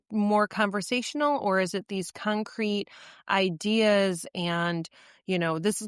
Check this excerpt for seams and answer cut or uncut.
uncut